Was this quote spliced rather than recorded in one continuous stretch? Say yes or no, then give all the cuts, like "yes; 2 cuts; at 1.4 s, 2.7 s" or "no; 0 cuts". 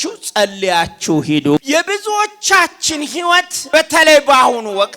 yes; 2 cuts; at 1.6 s, 3.6 s